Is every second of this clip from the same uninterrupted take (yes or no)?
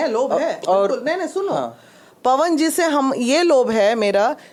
yes